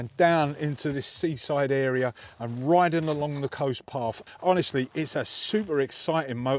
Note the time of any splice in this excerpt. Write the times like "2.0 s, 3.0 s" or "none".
4.2 s